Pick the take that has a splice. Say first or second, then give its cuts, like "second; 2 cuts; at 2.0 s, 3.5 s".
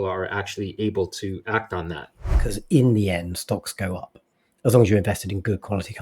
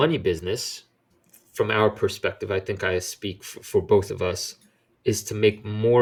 first; 1 cut; at 2.3 s